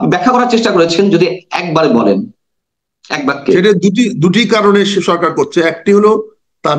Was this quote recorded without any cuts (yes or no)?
yes